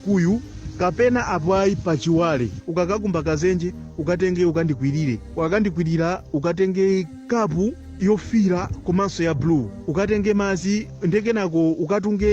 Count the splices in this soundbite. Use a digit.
1